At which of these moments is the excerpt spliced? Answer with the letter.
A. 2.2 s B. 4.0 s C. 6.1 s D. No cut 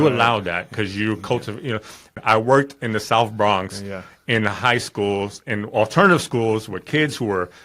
A